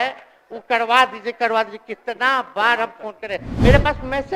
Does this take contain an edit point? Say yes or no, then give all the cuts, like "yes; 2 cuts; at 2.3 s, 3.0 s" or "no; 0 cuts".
no; 0 cuts